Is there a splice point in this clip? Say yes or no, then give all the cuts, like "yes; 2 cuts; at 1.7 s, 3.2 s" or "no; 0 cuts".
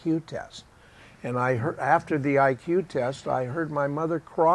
yes; 1 cut; at 1.8 s